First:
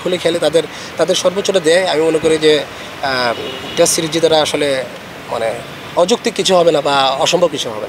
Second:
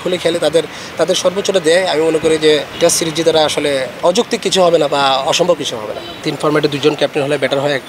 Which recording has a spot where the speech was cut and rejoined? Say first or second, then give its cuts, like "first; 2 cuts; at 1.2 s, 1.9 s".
second; 3 cuts; at 2.7 s, 3.9 s, 6.2 s